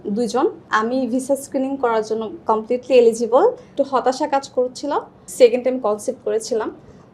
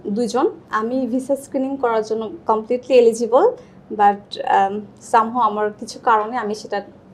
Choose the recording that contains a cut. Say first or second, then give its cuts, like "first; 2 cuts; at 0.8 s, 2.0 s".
first; 2 cuts; at 3.7 s, 5.2 s